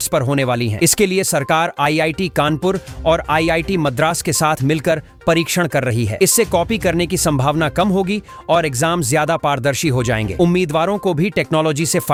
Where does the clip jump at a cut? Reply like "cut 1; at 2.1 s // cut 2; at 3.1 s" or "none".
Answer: none